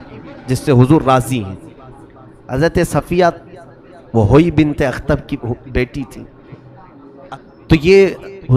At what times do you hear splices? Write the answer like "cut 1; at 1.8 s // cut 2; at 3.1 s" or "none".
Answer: cut 1; at 7.3 s